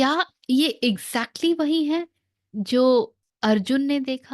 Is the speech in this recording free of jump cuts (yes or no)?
no